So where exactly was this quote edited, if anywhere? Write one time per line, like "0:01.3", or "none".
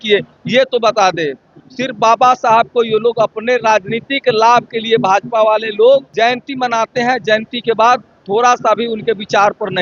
0:06.1